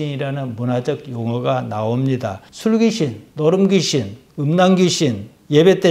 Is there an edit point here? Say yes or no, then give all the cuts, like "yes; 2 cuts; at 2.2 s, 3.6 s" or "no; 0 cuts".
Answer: no; 0 cuts